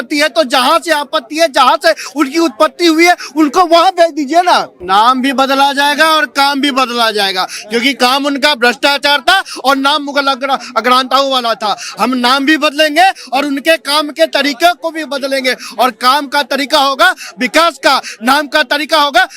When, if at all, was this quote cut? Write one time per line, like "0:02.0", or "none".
0:04.8